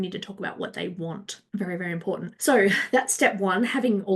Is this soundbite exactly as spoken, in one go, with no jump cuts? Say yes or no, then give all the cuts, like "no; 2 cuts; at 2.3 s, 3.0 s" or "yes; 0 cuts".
no; 2 cuts; at 1.3 s, 2.3 s